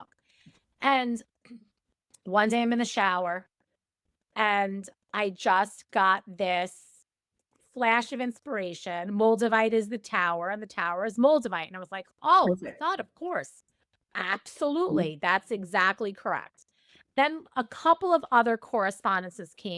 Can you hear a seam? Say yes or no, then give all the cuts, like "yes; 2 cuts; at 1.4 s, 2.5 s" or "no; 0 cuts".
yes; 1 cut; at 17.2 s